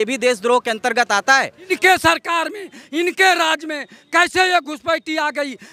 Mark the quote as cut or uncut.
cut